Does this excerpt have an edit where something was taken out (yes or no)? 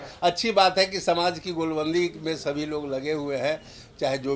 no